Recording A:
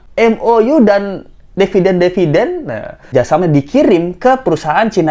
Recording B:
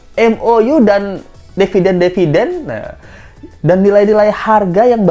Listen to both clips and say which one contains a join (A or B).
A